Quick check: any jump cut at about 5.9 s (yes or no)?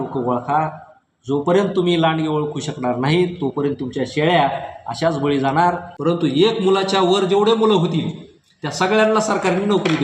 yes